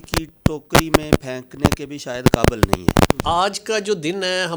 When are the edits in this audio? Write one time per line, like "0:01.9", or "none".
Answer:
0:03.2